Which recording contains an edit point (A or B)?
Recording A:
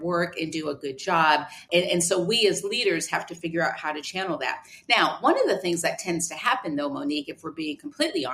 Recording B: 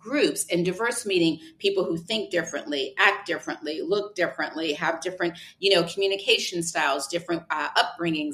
A